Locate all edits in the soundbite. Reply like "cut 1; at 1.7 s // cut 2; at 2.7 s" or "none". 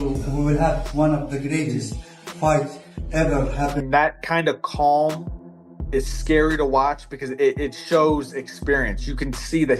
cut 1; at 3.8 s